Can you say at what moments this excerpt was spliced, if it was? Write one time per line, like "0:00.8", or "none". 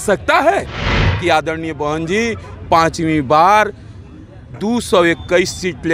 0:01.0